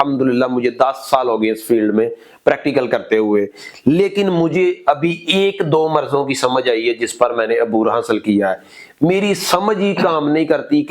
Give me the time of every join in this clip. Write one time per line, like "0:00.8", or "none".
none